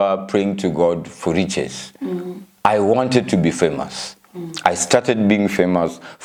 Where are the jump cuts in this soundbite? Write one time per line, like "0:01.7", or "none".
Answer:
none